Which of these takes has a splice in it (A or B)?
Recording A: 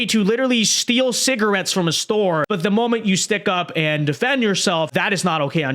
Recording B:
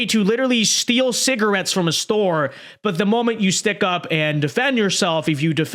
A